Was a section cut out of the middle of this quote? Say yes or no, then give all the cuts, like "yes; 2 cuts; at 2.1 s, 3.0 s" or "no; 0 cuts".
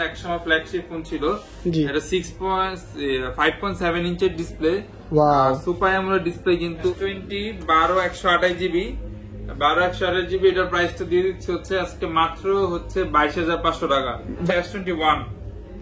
yes; 2 cuts; at 6.9 s, 14.5 s